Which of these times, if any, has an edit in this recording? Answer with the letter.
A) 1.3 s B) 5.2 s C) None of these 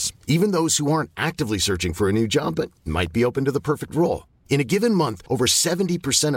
C